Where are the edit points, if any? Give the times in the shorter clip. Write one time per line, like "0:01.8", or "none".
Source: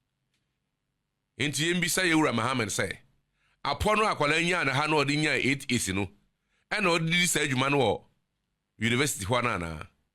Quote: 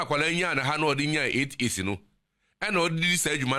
none